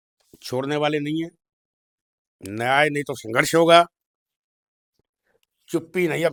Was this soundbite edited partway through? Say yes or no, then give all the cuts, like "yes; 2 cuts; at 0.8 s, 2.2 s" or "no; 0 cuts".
no; 0 cuts